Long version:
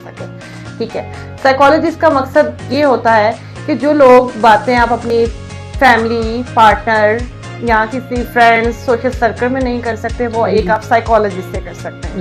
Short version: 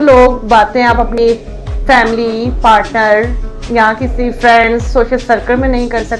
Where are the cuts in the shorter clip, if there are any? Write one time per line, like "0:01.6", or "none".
none